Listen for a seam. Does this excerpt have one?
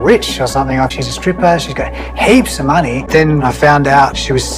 yes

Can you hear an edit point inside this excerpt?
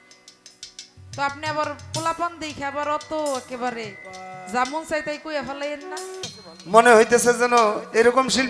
yes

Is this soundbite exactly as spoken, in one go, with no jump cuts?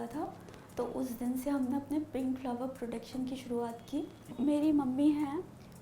no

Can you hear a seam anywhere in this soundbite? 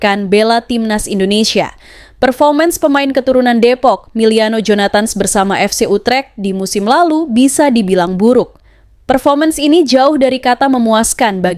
no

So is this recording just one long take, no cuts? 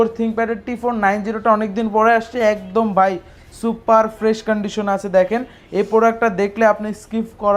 yes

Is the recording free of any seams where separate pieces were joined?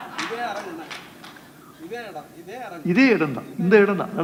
yes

